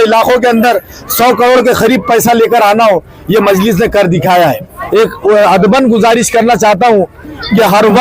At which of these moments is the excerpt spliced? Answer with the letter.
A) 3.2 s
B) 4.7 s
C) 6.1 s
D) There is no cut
B